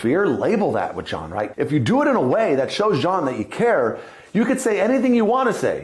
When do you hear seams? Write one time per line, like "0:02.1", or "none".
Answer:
0:01.5